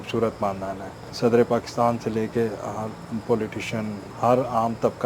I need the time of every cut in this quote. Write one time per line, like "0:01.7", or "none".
0:01.0